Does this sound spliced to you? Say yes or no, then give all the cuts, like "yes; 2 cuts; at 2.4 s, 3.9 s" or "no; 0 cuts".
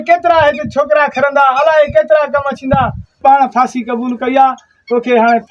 yes; 1 cut; at 3.1 s